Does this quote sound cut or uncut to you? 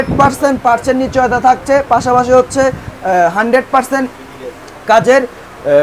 uncut